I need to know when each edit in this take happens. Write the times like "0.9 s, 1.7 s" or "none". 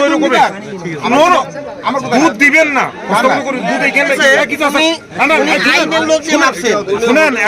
4.2 s